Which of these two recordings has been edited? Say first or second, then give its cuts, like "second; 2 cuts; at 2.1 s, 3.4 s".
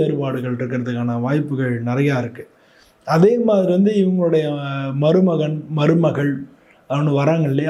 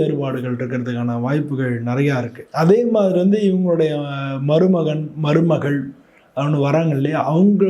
second; 1 cut; at 2.4 s